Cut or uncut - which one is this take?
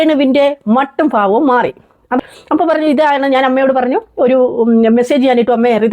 cut